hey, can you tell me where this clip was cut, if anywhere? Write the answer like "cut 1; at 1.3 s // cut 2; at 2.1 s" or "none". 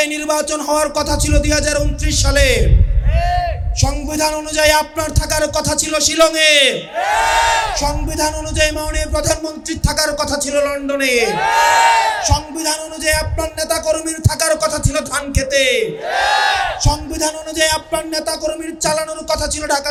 none